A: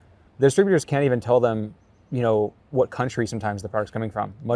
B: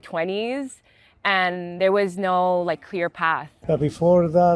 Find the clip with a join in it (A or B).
B